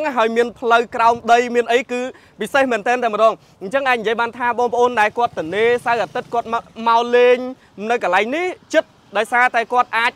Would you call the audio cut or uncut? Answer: uncut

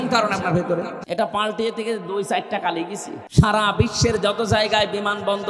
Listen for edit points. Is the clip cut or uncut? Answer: cut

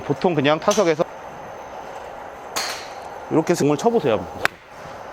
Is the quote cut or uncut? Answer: cut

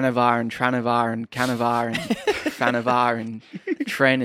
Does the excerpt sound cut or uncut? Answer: uncut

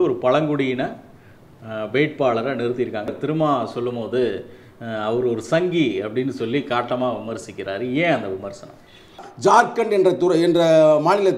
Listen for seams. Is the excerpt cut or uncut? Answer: cut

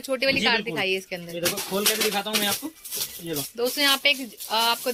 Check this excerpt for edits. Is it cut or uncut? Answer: uncut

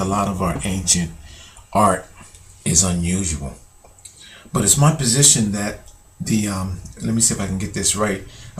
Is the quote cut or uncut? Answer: cut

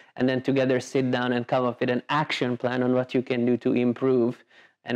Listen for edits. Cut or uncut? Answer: uncut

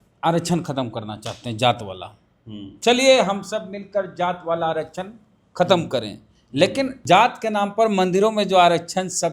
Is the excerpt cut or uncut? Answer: cut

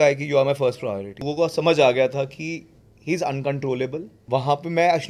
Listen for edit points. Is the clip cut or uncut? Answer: cut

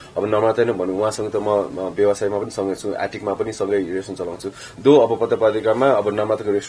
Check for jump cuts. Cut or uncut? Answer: uncut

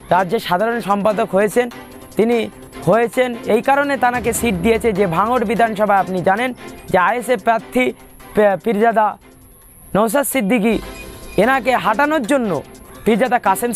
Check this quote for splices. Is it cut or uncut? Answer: uncut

